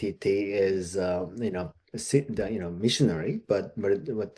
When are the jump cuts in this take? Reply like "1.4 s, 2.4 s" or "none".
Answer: none